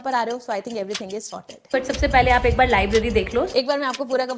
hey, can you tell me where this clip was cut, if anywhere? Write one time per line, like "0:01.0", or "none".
0:01.7
0:03.5